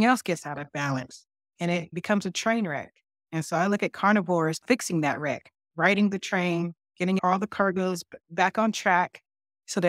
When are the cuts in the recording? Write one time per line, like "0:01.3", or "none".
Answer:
0:01.9
0:04.6
0:07.2
0:08.1